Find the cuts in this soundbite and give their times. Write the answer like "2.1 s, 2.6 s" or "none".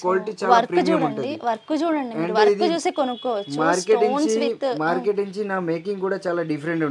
none